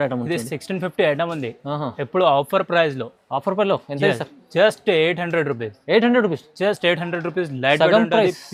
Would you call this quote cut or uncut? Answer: uncut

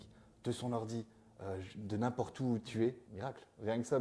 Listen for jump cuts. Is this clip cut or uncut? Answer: cut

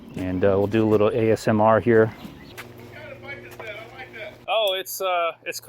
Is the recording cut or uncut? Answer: cut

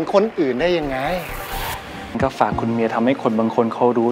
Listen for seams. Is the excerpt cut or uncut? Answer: cut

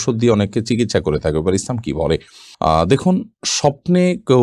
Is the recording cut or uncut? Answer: uncut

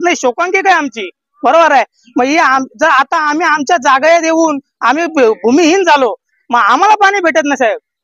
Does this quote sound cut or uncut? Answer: uncut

